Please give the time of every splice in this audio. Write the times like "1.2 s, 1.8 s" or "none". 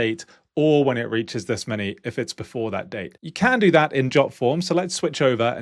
3.2 s

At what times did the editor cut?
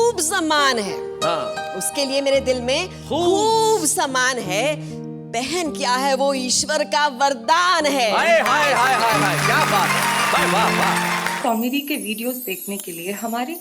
11.3 s

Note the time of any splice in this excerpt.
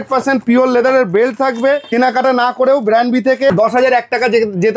1.9 s, 3.5 s

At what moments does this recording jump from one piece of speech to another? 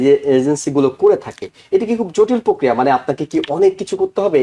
none

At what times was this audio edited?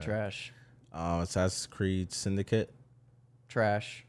none

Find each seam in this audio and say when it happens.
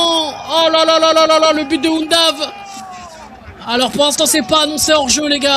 none

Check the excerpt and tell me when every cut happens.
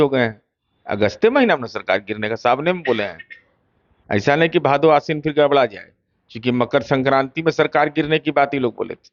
none

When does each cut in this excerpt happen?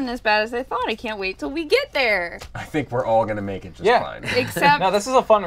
none

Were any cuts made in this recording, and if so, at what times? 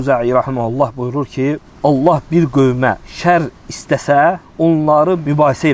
1.7 s, 3.1 s, 5.0 s

